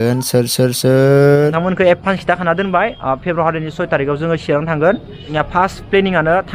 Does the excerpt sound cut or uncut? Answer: cut